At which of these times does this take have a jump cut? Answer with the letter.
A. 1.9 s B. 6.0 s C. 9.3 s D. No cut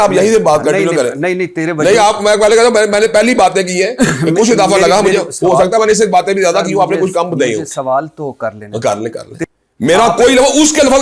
C